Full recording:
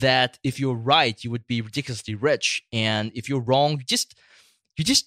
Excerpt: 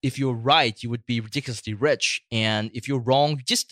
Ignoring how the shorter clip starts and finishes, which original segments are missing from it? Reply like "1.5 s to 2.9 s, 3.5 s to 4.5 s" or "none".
none

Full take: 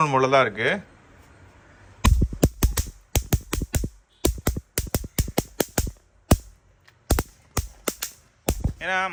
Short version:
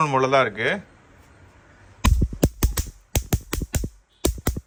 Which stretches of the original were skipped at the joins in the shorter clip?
none

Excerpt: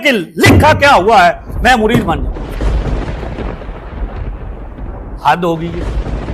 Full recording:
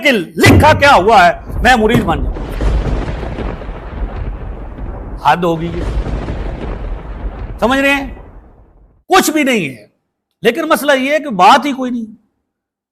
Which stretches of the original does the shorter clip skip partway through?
none

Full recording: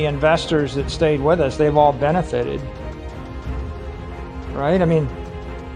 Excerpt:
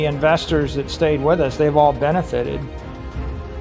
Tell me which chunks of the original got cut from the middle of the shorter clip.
2.6 s to 2.9 s

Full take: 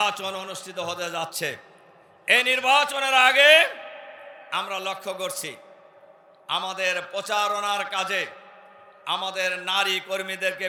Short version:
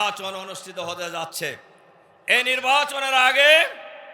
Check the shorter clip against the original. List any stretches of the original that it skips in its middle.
none

